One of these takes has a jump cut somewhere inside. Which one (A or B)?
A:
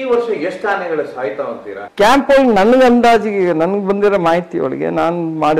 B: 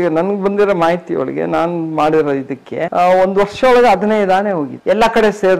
A